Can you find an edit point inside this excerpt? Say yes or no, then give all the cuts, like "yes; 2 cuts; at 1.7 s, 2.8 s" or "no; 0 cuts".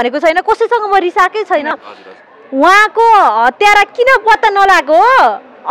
yes; 1 cut; at 1.8 s